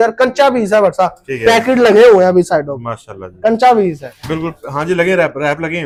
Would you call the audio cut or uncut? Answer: uncut